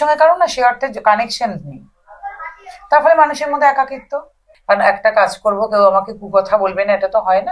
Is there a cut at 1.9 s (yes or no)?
no